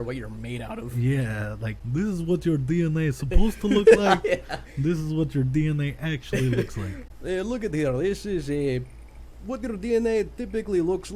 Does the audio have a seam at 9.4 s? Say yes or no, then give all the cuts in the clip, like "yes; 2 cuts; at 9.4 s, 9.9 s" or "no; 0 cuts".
no; 2 cuts; at 1.7 s, 6.9 s